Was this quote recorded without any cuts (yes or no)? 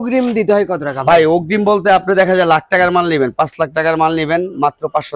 yes